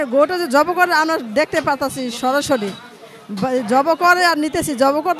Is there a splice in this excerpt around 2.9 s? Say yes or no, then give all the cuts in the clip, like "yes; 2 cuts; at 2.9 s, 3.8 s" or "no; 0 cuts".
no; 0 cuts